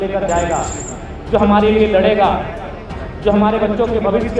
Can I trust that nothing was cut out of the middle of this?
yes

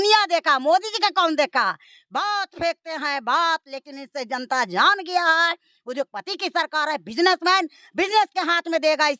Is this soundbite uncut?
yes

